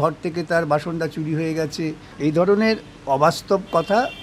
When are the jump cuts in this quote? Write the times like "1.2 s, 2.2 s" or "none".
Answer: 2.1 s